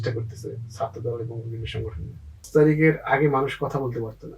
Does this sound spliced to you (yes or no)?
yes